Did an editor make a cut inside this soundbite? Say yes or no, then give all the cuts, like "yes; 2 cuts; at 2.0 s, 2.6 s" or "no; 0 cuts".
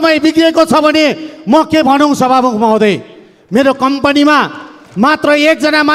no; 0 cuts